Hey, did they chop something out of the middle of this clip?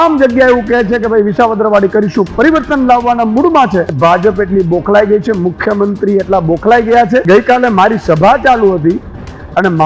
yes; 2 cuts; at 3.9 s, 7.2 s

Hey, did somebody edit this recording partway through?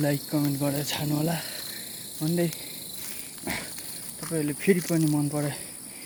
no; 0 cuts

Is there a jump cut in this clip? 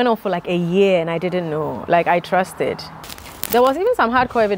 yes; 1 cut; at 2.9 s

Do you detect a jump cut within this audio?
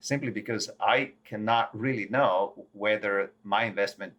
no; 0 cuts

